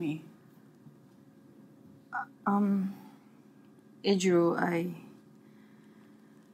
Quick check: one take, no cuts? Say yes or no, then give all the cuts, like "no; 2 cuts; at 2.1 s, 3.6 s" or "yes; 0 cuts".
yes; 0 cuts